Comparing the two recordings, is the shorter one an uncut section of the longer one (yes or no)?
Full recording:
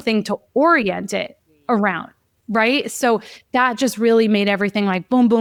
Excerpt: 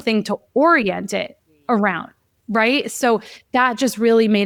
yes